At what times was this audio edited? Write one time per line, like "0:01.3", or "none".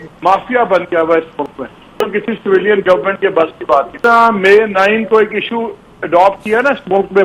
0:01.9
0:03.9